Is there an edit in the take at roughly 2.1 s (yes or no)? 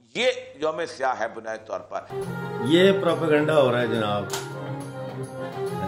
yes